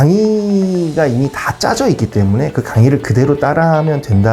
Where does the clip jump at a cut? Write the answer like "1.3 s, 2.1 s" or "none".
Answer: none